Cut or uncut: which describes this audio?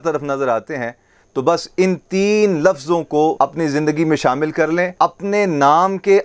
cut